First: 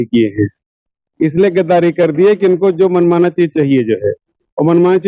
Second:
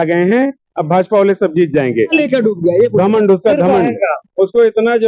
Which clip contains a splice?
second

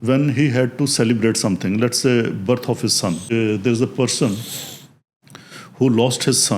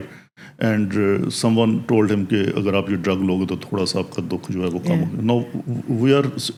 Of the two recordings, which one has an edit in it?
first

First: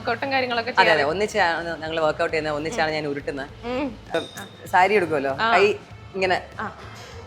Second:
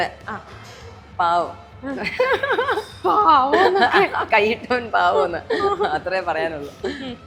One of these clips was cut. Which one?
first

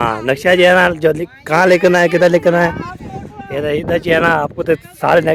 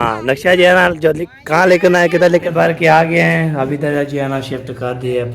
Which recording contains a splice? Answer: second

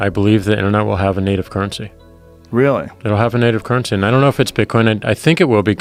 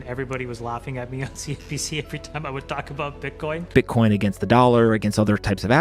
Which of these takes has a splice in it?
second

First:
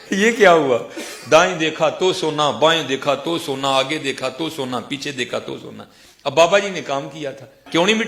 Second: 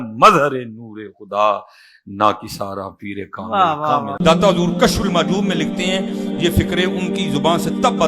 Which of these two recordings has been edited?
second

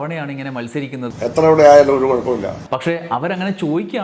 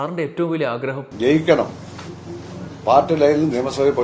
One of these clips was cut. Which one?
first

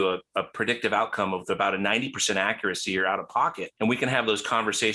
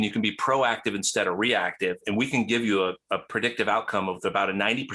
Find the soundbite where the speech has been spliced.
first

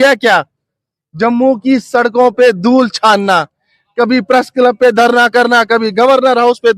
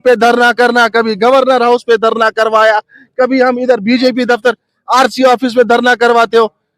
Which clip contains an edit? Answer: second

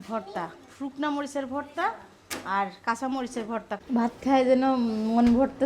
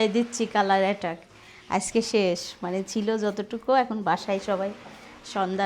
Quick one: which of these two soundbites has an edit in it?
first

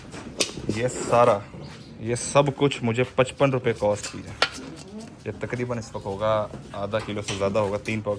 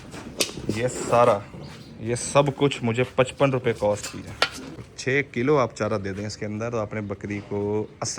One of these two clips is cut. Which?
second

